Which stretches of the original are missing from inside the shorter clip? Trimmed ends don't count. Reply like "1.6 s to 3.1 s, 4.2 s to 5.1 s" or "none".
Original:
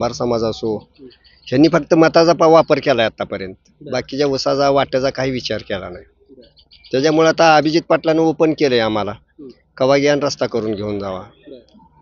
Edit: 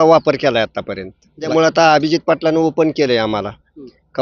3.9 s to 7.1 s